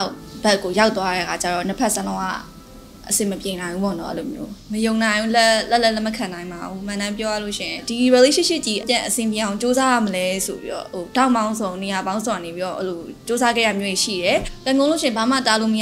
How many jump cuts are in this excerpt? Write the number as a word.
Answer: four